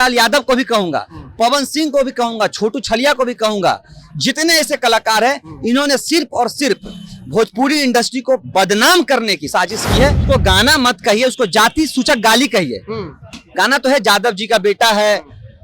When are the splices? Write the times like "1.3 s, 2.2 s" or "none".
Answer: 10.2 s